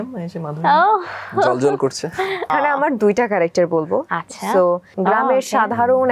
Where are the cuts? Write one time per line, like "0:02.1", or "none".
0:02.5
0:04.9